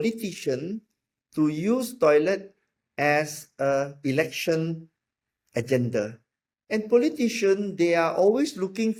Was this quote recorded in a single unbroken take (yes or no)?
yes